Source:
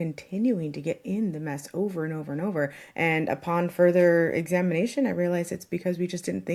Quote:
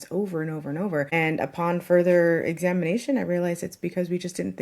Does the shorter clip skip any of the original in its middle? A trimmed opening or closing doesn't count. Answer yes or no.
yes